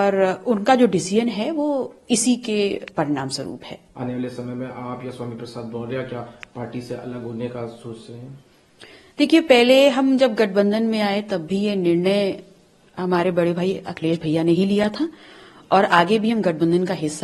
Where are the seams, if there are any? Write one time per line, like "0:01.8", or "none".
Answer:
none